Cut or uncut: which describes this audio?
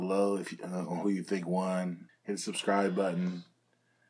cut